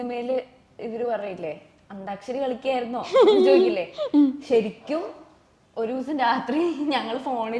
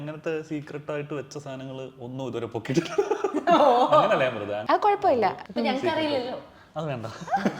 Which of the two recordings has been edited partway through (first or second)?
second